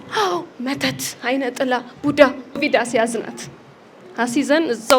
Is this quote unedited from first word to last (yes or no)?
no